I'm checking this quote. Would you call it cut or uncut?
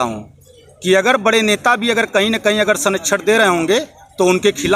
uncut